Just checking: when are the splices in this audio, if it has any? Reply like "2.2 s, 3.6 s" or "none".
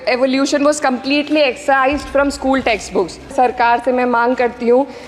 3.3 s